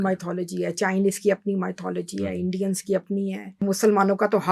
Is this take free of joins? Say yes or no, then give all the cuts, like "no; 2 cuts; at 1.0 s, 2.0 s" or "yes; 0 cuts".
no; 1 cut; at 3.6 s